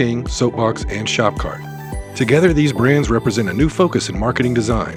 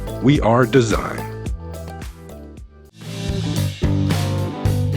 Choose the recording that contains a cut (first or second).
second